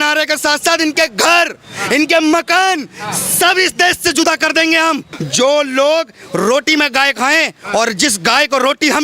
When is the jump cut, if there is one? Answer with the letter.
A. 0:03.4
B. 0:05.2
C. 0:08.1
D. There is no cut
B